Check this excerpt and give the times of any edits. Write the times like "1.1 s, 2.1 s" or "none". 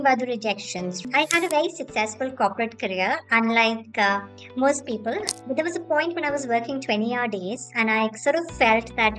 1.0 s, 5.3 s